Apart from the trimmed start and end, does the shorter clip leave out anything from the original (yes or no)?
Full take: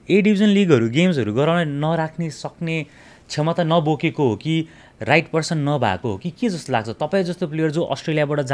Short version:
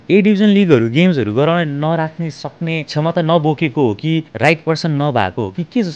yes